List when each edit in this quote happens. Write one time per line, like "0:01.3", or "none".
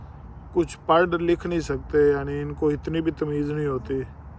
none